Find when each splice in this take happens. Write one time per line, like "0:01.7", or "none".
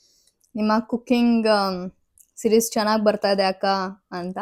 none

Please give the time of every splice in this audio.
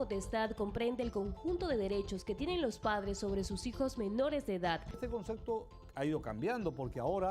0:04.9

